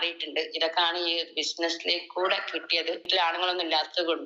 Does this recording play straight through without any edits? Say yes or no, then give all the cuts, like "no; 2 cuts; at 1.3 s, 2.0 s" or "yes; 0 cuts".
no; 1 cut; at 3.1 s